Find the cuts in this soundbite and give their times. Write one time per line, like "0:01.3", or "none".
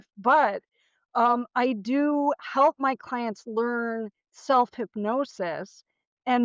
none